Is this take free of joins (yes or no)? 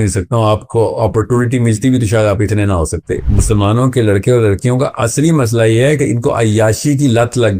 no